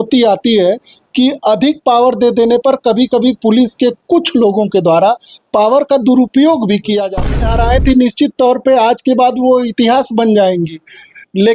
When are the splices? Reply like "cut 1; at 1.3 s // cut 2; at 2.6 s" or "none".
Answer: cut 1; at 7.3 s